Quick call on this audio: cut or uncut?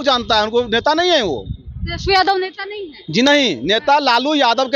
uncut